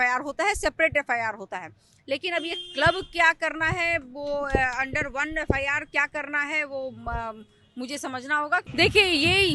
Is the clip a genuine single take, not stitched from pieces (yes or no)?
no